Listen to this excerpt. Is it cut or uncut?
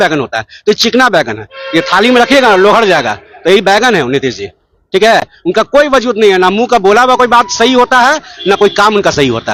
uncut